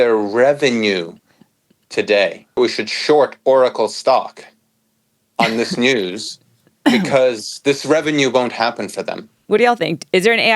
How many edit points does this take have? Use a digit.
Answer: 2